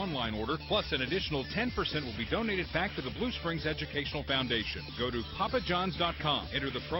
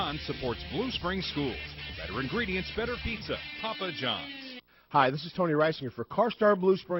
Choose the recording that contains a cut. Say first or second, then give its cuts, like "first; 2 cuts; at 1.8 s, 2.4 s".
second; 1 cut; at 4.6 s